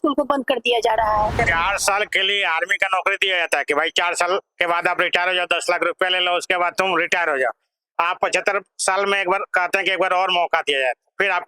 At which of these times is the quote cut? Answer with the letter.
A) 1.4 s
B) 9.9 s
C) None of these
A